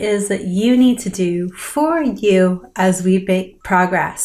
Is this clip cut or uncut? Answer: uncut